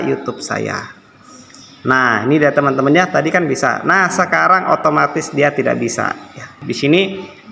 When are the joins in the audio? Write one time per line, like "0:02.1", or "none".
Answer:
0:06.6